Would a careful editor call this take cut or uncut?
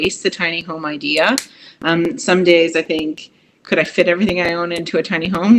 uncut